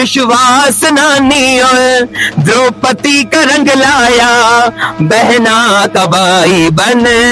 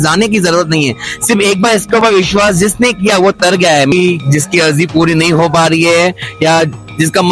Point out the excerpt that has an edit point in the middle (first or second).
second